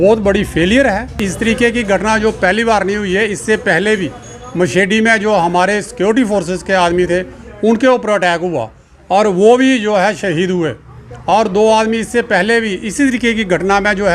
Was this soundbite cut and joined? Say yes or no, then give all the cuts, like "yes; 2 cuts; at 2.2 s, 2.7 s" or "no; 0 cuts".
yes; 1 cut; at 1.2 s